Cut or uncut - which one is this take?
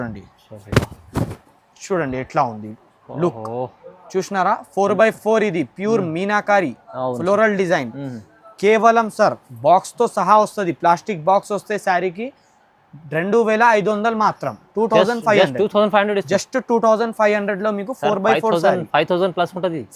uncut